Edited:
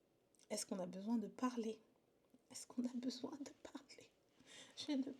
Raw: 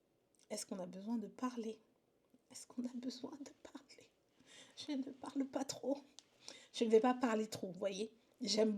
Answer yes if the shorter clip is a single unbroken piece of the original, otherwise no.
yes